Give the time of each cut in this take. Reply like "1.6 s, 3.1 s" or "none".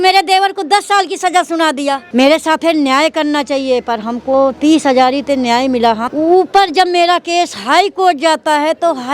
2.0 s, 6.0 s